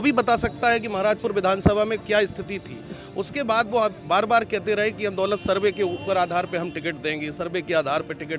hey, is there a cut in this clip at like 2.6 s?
no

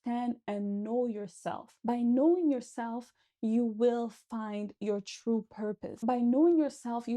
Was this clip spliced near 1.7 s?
yes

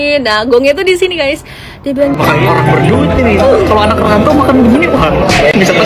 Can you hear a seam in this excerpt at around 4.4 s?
no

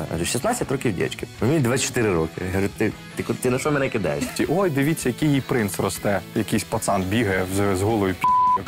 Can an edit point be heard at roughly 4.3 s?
yes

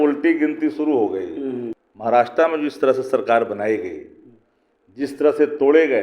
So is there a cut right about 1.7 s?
yes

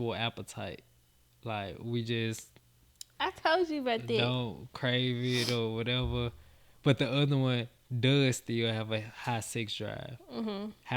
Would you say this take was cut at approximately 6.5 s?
no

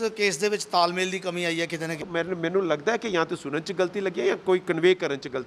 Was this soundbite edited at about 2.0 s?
yes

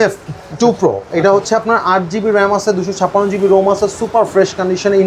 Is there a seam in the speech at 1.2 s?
no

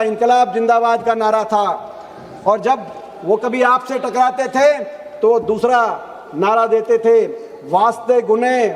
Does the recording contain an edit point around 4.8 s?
no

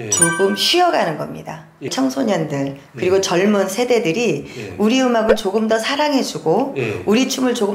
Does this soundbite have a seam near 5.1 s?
no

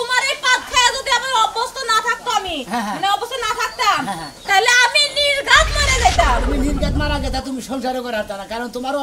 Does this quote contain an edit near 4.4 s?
no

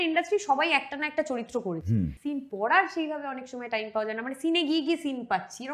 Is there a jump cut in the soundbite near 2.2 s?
yes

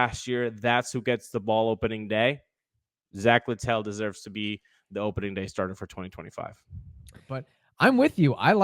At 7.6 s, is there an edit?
yes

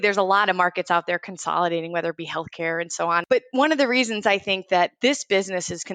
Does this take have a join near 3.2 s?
yes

